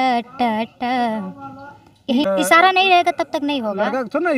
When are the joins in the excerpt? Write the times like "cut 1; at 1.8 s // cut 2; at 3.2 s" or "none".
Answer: cut 1; at 2.2 s